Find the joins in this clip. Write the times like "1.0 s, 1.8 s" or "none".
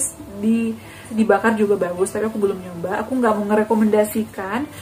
1.1 s